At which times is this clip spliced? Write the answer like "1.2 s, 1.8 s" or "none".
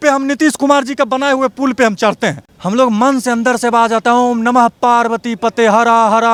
none